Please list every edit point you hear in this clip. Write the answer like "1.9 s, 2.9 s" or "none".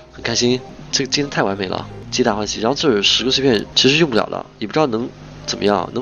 none